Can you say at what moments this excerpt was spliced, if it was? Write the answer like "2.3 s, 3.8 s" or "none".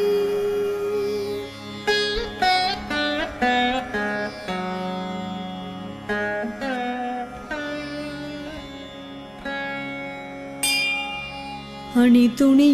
none